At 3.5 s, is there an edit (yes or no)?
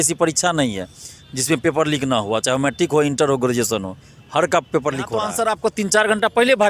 no